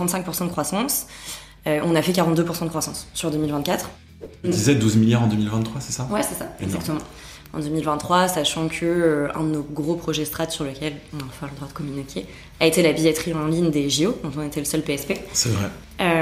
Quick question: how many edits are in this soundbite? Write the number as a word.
one